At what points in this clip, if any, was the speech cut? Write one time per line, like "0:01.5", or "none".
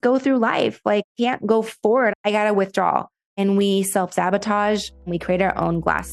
0:01.1
0:02.1
0:03.2
0:05.1